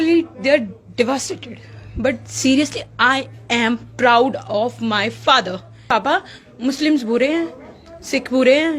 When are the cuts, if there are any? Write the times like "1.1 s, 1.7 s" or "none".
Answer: 5.9 s

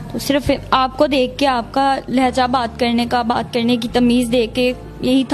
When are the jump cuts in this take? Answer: none

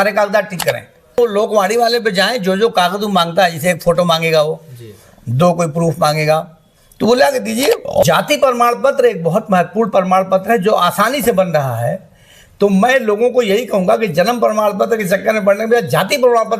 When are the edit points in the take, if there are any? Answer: 1.2 s, 8.0 s

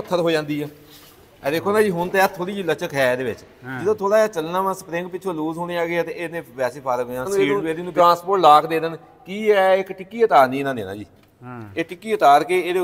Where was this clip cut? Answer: 7.3 s

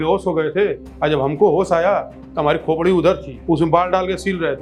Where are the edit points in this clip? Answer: none

